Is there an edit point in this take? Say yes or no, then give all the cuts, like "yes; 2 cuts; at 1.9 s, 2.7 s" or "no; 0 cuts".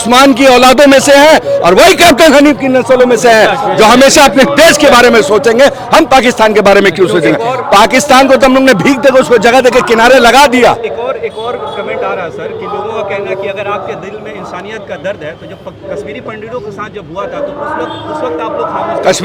no; 0 cuts